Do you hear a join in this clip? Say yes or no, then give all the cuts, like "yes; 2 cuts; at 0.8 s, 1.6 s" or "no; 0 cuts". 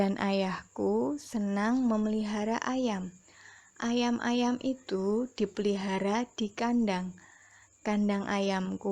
yes; 1 cut; at 6.5 s